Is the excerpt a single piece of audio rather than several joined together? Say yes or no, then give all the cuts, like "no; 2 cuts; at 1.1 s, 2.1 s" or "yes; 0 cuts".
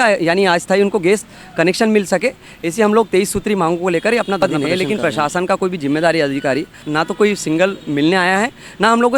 no; 2 cuts; at 4.4 s, 6.8 s